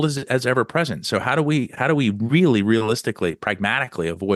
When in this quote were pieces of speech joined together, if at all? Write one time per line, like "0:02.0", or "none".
none